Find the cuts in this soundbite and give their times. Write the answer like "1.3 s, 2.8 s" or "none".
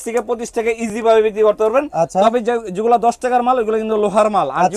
none